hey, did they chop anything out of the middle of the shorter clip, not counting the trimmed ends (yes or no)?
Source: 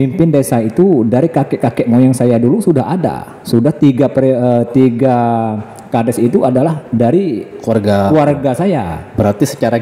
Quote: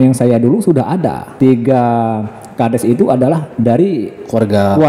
yes